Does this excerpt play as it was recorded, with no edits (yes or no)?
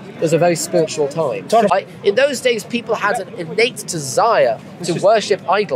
no